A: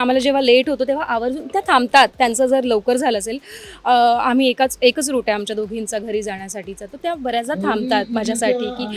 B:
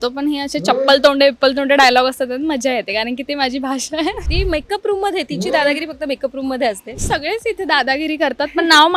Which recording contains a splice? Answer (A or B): B